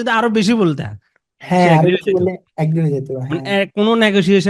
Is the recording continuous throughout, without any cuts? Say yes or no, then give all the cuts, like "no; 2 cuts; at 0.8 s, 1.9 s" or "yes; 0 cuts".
yes; 0 cuts